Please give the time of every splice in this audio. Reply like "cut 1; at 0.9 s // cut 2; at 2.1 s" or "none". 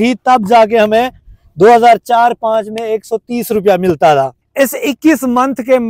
cut 1; at 4.4 s